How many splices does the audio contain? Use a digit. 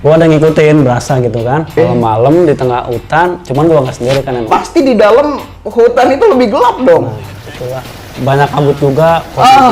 2